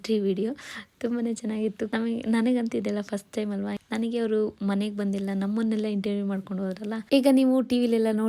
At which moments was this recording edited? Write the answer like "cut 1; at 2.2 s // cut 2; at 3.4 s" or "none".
cut 1; at 1.9 s // cut 2; at 7.0 s